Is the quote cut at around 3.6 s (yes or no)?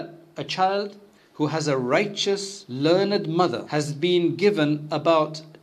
yes